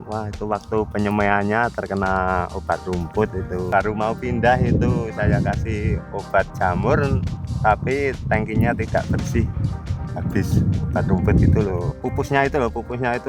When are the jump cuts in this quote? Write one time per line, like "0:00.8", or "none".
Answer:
0:03.6
0:11.8